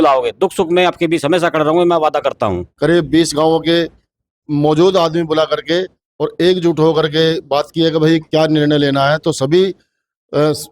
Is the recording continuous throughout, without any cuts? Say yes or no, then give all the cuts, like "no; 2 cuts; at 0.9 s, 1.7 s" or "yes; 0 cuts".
no; 1 cut; at 2.7 s